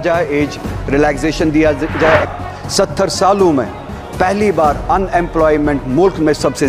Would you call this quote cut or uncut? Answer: cut